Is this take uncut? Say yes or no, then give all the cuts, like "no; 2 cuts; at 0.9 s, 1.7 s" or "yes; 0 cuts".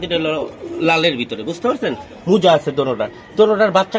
yes; 0 cuts